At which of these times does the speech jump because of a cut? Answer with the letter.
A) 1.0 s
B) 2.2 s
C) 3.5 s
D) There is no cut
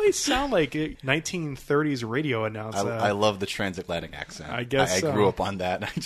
A